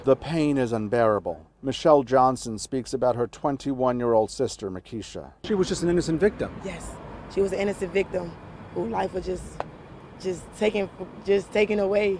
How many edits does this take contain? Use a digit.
0